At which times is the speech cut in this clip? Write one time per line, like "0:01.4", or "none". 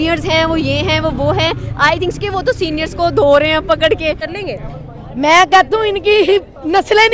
0:04.2